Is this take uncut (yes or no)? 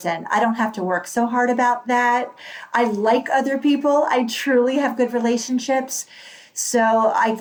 yes